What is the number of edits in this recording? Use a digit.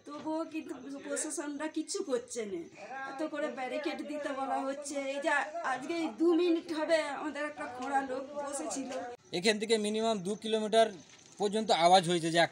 1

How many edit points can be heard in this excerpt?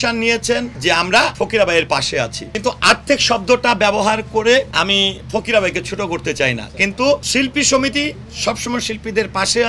4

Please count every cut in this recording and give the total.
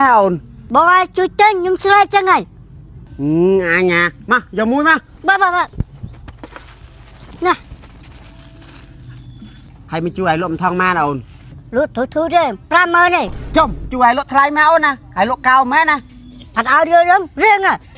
0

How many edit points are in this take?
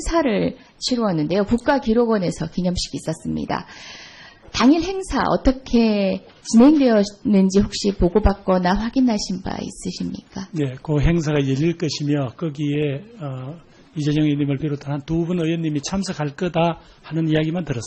1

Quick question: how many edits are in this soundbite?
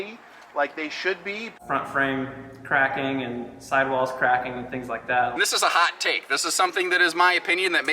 2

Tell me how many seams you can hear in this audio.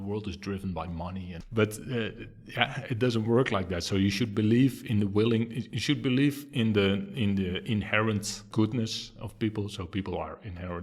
2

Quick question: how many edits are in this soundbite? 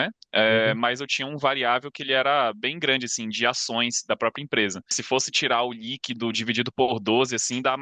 1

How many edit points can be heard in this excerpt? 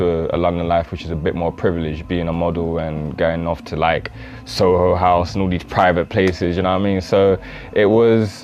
0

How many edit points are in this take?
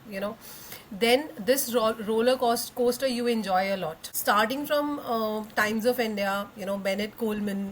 1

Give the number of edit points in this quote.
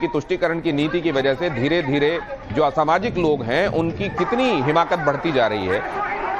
1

